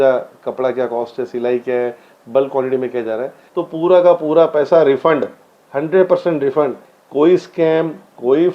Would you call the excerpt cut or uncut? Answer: cut